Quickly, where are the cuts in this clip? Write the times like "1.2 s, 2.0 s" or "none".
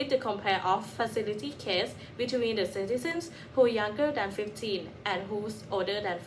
none